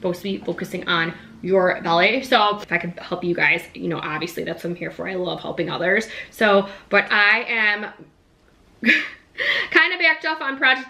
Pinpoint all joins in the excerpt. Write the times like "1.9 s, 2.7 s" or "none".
2.6 s